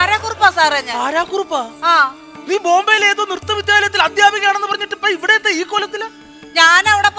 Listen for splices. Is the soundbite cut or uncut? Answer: cut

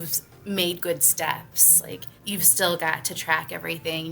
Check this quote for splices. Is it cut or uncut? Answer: cut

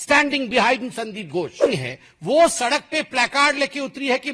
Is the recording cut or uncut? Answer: cut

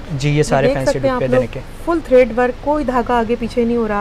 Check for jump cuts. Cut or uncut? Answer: uncut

